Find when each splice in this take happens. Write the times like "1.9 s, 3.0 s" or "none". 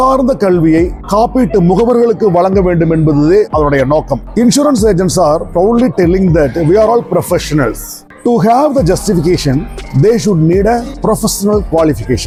none

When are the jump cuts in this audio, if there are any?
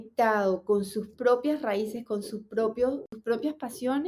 3.1 s

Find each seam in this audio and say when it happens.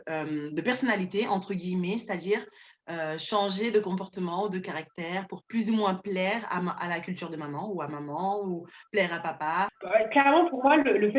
5.2 s, 9.8 s

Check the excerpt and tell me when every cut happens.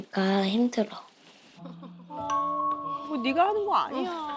none

